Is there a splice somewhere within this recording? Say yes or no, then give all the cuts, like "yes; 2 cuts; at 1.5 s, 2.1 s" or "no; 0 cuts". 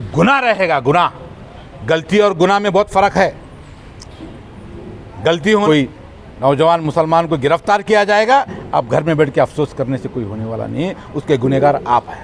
yes; 1 cut; at 5.7 s